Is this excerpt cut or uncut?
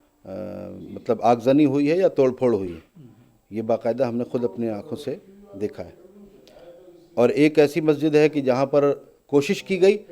uncut